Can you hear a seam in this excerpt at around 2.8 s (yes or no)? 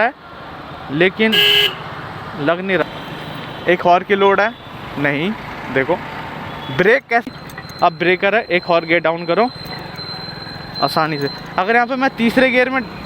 yes